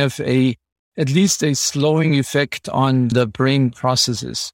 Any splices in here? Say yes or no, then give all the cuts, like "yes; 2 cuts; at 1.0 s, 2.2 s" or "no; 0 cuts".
yes; 1 cut; at 3.1 s